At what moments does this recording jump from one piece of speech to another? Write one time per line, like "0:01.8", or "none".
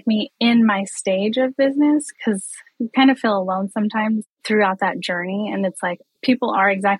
0:02.1
0:04.3
0:06.0